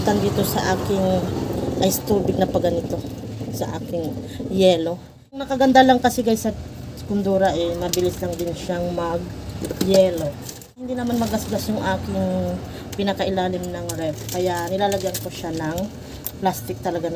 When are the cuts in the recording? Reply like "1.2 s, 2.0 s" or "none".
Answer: 5.5 s, 11.0 s

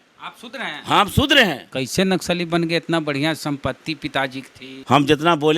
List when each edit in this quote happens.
1.7 s, 4.7 s

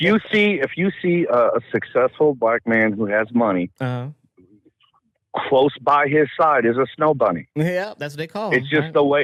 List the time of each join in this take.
none

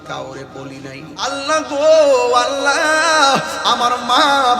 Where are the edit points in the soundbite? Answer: 1.3 s

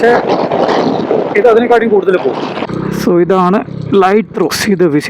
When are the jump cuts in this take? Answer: 2.6 s

